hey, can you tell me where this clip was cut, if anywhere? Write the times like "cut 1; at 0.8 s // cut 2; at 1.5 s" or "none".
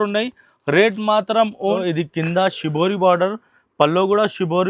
cut 1; at 1.6 s